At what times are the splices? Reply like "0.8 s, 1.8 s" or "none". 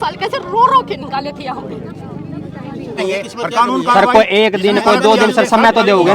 3.0 s